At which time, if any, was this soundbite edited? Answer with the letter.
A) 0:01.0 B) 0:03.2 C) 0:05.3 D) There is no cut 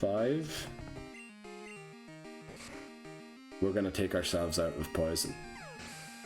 C